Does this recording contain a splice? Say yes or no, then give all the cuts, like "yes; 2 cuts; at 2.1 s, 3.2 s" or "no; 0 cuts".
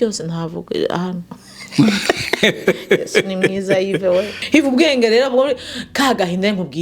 yes; 1 cut; at 4.4 s